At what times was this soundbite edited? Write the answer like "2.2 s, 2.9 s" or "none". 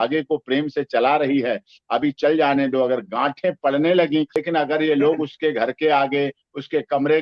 4.4 s